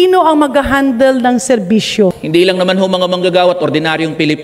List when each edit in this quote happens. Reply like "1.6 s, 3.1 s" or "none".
2.2 s